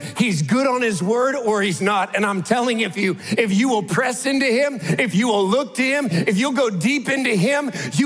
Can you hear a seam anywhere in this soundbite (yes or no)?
no